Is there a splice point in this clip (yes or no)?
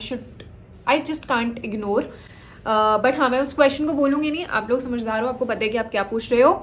no